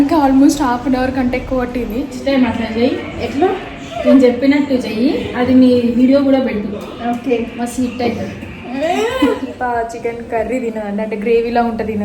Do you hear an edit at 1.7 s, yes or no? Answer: yes